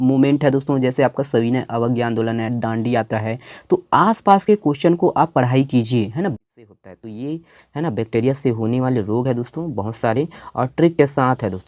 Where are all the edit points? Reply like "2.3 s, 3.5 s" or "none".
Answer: 6.4 s